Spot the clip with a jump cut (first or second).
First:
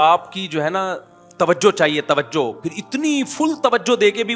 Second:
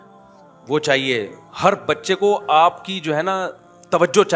second